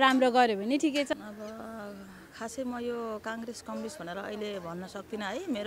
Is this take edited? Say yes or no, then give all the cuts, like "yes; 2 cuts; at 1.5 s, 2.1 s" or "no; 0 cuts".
yes; 1 cut; at 1.1 s